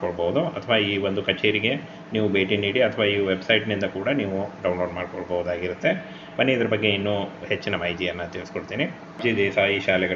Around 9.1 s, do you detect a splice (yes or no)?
yes